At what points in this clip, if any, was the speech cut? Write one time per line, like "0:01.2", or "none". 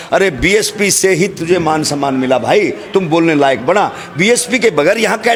none